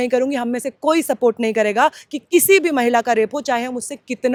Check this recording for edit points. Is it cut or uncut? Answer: uncut